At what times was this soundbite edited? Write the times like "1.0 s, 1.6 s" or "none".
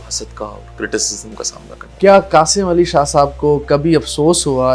1.9 s